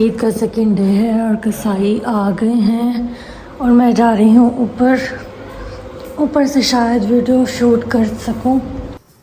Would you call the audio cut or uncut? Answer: uncut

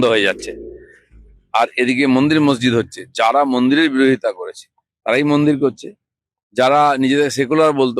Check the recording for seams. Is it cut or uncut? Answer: uncut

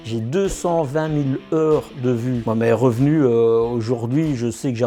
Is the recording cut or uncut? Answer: cut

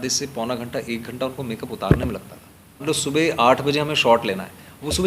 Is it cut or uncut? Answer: cut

